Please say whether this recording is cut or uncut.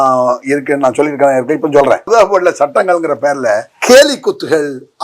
cut